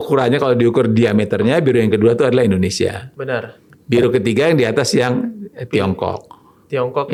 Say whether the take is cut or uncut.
uncut